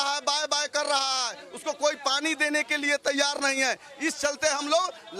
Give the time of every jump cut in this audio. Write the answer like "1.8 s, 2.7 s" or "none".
none